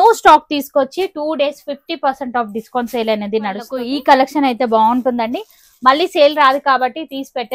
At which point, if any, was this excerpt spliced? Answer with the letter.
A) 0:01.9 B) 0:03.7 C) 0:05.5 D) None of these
B